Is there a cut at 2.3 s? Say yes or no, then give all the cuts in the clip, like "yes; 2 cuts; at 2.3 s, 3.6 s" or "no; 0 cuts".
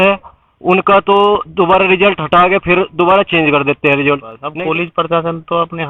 no; 1 cut; at 4.4 s